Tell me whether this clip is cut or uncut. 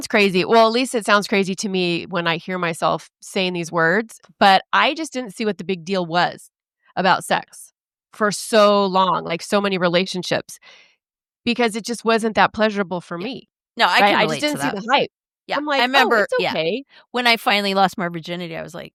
uncut